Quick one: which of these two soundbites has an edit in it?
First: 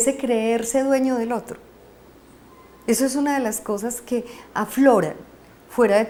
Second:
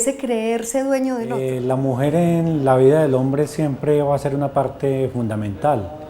second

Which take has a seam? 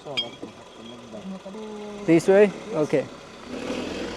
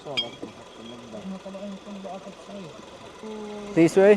first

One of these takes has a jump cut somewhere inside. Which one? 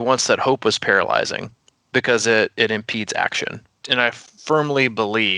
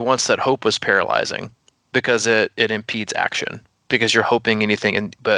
first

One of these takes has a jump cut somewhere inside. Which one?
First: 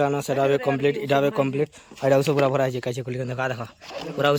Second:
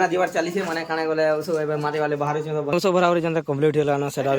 second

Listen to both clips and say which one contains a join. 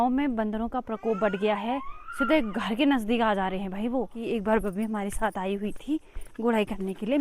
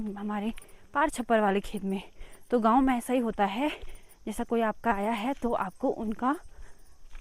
first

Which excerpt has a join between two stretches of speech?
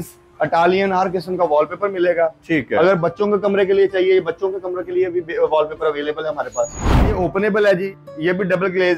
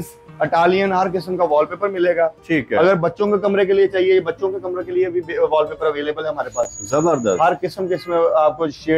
first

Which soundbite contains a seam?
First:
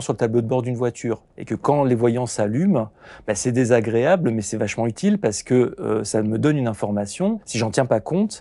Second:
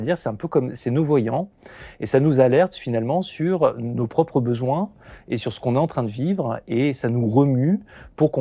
first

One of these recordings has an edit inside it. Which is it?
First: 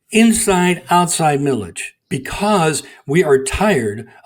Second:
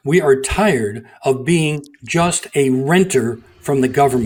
first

